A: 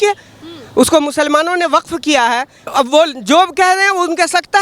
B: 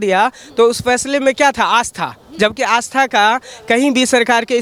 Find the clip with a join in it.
A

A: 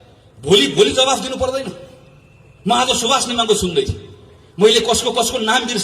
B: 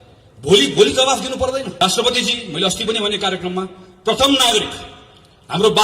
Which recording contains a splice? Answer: B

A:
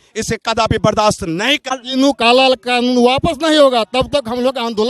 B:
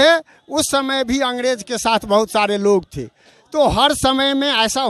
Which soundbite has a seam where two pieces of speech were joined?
A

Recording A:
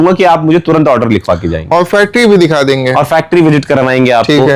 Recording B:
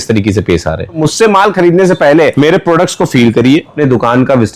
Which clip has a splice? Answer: B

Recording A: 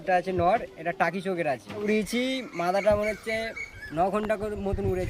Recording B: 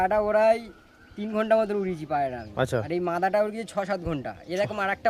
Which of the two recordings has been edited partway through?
A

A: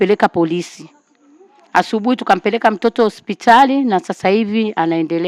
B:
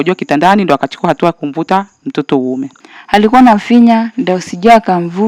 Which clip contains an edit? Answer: B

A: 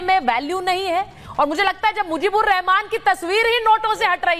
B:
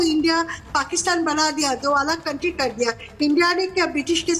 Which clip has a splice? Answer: A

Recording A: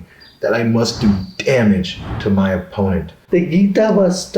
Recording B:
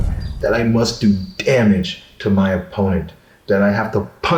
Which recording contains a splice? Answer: A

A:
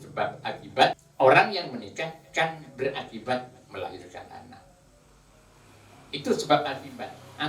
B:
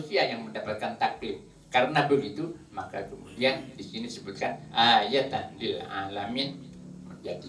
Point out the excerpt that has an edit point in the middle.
A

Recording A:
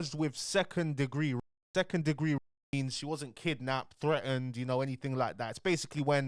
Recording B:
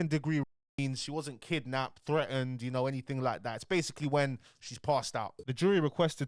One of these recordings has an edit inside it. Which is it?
B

